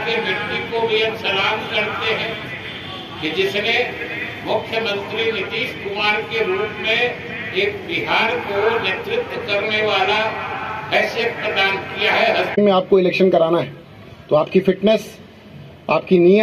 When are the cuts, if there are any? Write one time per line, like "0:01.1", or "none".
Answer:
0:12.6